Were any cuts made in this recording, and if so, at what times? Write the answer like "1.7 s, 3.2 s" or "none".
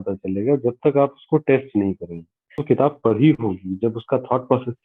2.6 s